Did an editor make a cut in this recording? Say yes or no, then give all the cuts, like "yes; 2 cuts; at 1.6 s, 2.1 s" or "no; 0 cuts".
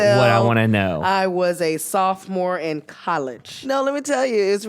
yes; 1 cut; at 3.5 s